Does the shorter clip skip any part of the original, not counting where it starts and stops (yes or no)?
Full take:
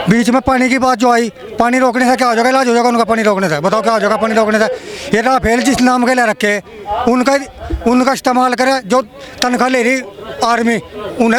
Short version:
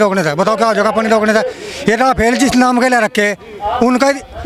no